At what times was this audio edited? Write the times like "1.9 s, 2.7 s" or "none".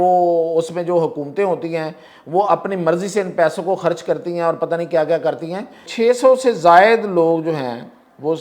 5.9 s